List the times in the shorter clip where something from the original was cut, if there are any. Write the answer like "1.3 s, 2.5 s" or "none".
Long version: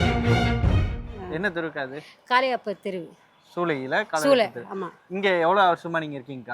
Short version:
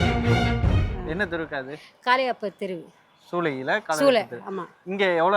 0.9 s